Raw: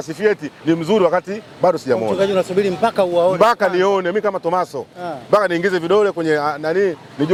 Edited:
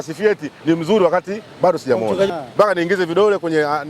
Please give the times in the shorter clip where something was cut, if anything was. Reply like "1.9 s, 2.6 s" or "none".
2.3 s